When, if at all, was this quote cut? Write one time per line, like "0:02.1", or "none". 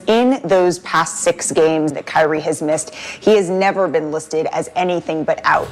0:01.9